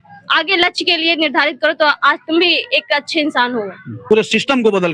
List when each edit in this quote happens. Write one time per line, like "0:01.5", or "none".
0:04.0